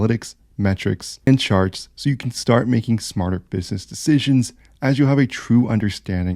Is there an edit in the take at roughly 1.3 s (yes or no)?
yes